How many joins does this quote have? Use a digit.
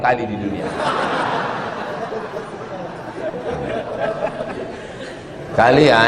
0